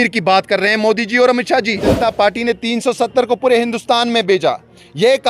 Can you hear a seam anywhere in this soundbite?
yes; 1 cut; at 1.9 s

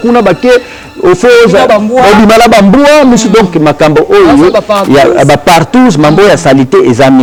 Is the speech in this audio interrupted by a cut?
no; 0 cuts

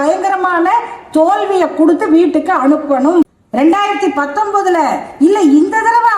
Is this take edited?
yes; 1 cut; at 3.4 s

